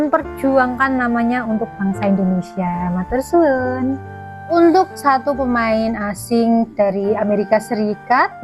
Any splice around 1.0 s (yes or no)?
no